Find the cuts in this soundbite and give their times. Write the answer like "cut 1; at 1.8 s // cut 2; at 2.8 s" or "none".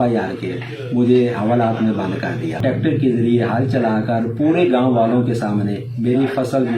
cut 1; at 2.6 s